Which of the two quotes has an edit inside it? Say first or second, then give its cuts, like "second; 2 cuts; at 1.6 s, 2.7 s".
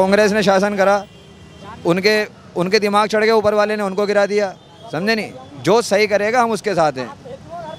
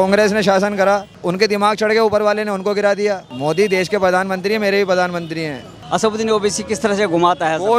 second; 3 cuts; at 1.1 s, 3.3 s, 5.8 s